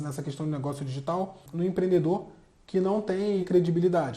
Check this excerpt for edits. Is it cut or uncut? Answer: cut